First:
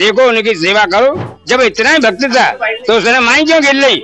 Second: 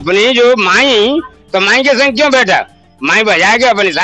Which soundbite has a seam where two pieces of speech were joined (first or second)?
first